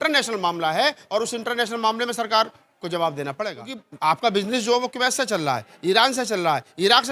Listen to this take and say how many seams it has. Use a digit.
1